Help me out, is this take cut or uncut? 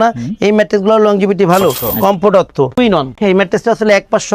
cut